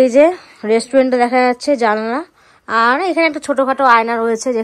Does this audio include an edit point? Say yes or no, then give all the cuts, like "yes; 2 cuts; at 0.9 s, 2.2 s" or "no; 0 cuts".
no; 0 cuts